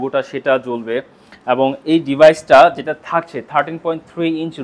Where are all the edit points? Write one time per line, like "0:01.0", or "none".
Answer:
none